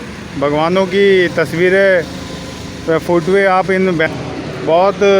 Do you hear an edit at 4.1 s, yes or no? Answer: yes